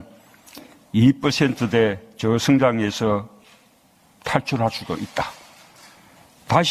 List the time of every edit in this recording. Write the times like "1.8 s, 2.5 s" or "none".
5.3 s